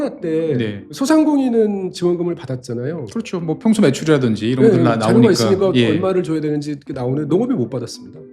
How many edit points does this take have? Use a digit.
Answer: 1